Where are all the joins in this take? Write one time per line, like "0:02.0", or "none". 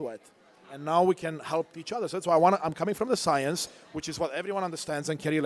none

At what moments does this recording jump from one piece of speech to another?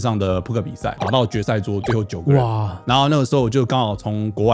0:01.0
0:02.7

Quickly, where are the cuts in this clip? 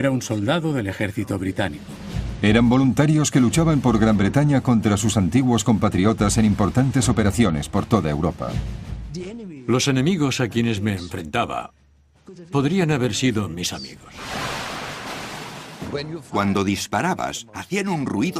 0:01.2

